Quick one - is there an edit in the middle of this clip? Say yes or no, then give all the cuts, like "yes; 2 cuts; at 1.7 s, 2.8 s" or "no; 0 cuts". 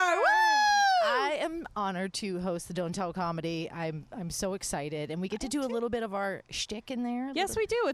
no; 0 cuts